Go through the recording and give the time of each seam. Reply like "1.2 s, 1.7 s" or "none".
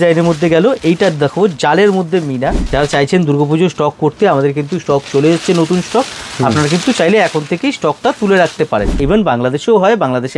2.6 s, 9.0 s